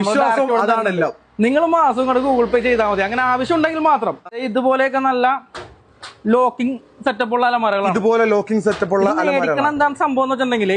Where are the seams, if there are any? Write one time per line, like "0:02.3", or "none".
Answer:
0:04.4